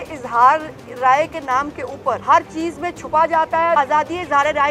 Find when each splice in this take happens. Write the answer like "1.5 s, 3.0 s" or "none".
2.2 s, 3.8 s